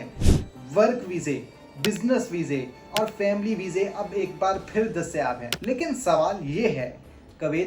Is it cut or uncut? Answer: cut